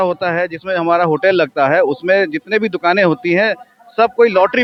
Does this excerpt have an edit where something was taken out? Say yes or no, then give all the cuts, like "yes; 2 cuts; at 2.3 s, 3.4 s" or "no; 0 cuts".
no; 0 cuts